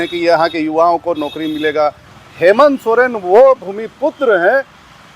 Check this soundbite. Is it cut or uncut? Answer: cut